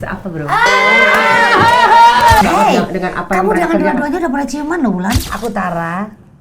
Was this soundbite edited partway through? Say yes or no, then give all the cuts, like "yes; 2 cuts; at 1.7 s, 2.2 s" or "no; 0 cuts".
yes; 2 cuts; at 2.4 s, 5.2 s